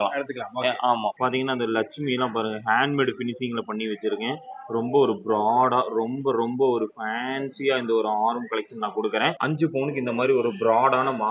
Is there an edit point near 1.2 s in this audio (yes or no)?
yes